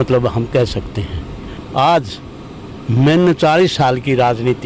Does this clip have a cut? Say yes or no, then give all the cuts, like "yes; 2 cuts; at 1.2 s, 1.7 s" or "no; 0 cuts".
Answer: yes; 1 cut; at 1.5 s